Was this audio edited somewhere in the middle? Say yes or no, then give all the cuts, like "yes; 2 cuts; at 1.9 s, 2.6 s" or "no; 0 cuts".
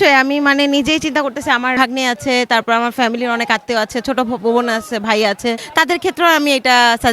yes; 2 cuts; at 1.7 s, 5.6 s